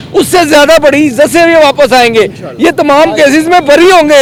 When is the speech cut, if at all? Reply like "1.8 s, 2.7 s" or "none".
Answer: none

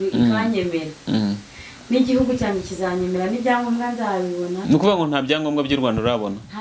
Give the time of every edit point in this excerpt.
4.7 s

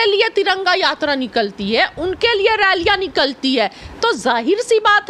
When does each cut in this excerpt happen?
none

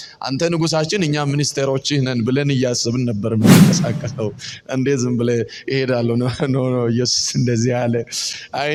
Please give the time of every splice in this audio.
none

